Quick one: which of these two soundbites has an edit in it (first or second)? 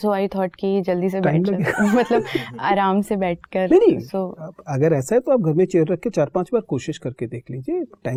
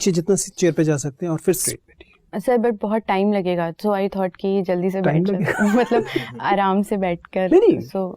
second